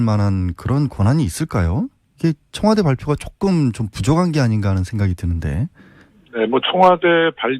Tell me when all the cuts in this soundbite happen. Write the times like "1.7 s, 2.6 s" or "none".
3.4 s